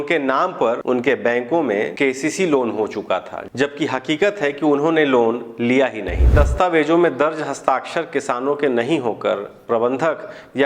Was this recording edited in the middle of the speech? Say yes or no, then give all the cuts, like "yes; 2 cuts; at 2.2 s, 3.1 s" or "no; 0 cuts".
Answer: yes; 3 cuts; at 0.8 s, 1.9 s, 6.3 s